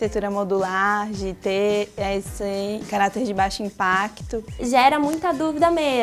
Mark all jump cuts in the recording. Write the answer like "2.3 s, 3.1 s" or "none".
4.6 s